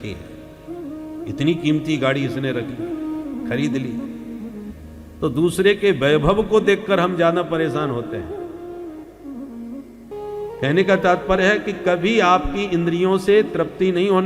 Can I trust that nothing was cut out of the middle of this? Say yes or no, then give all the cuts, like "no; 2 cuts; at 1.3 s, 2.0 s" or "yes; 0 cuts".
no; 1 cut; at 10.1 s